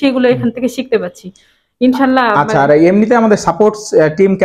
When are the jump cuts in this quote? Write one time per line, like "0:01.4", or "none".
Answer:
none